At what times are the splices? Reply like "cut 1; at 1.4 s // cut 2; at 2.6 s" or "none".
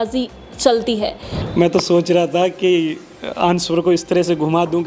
cut 1; at 1.3 s